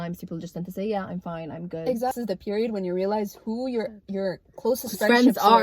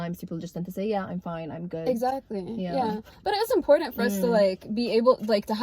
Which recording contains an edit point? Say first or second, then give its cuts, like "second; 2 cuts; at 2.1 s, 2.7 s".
first; 1 cut; at 2.1 s